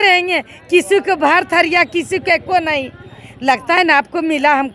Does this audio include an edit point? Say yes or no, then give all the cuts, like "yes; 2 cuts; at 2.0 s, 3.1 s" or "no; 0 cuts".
no; 0 cuts